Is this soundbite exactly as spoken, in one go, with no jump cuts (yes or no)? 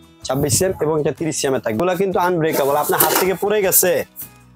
no